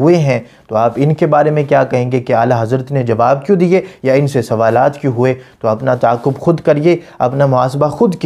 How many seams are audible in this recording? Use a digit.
0